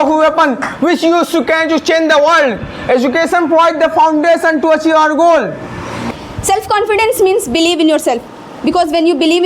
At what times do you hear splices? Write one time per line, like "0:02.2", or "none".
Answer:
0:06.0

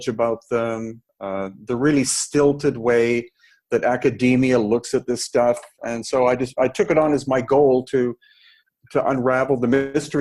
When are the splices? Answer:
0:08.6

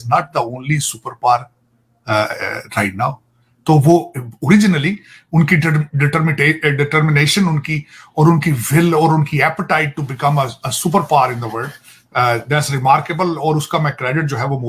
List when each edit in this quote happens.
none

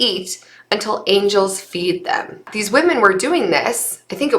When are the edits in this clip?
0:02.5

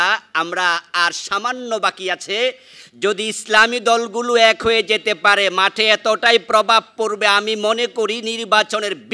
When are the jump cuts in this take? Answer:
none

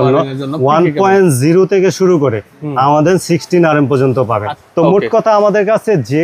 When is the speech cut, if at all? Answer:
0:04.5

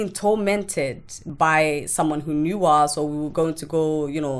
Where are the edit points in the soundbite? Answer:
0:01.2

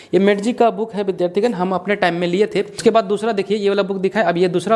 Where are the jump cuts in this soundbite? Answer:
0:02.8

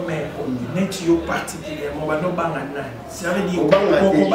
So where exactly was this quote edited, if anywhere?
none

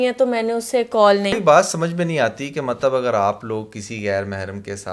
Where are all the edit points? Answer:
0:01.3

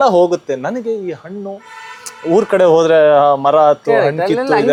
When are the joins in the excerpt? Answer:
none

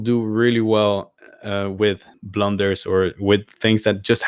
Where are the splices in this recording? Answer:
0:02.1

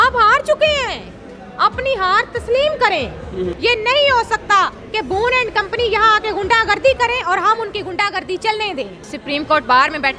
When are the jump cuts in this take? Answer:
0:03.5
0:09.1

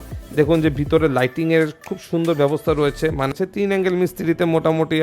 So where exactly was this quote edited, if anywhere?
0:03.4

